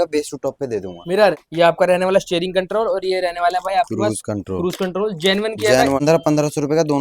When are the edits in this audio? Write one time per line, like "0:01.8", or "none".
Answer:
0:01.4
0:06.0